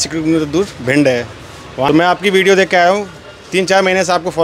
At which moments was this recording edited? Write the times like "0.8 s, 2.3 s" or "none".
1.9 s